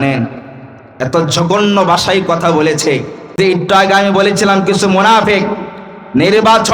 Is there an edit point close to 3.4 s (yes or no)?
yes